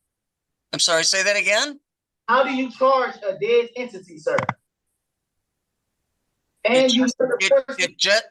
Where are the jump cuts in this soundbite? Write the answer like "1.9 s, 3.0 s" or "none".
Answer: none